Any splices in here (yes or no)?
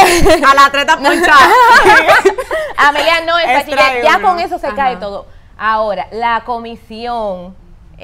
no